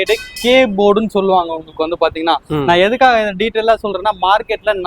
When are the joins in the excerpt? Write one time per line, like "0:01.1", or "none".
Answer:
none